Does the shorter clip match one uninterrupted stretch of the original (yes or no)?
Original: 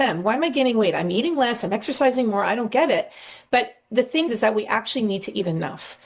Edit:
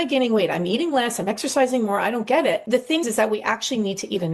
no